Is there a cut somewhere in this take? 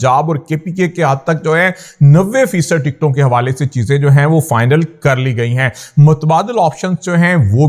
no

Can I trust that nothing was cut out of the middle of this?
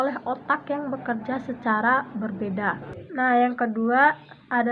no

